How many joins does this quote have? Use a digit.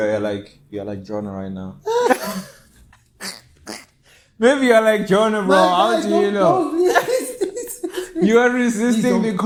0